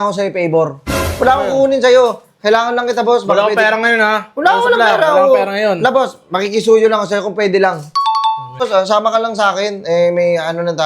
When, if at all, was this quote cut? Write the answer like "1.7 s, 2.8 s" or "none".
8.6 s